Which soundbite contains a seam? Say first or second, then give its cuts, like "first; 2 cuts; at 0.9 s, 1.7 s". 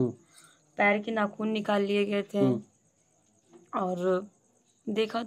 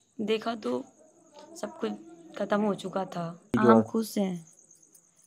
second; 1 cut; at 3.5 s